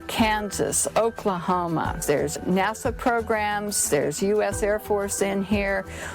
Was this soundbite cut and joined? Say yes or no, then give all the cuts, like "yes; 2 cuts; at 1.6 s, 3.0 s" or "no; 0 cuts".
yes; 1 cut; at 2.4 s